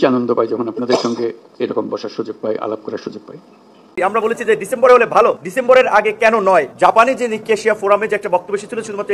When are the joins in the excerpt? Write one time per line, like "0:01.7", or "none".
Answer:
0:04.0